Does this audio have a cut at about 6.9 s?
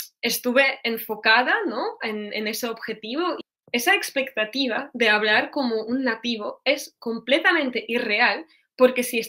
no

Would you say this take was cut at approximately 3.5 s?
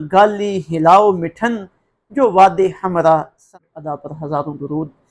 yes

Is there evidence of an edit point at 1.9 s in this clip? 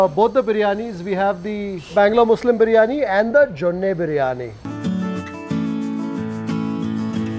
no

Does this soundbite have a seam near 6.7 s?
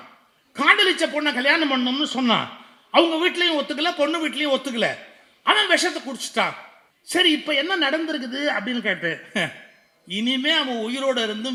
no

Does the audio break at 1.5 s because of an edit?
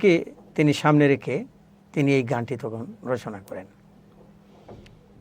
no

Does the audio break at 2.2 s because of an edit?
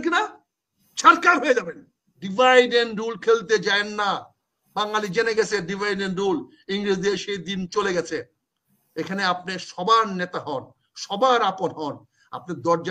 yes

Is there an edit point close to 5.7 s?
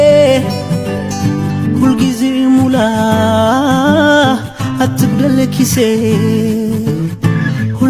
no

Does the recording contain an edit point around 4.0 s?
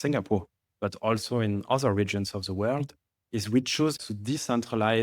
yes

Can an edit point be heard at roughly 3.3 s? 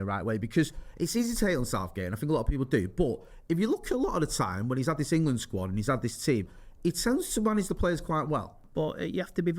no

